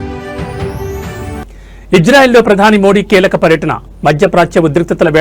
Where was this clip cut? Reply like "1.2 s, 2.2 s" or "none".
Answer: 1.4 s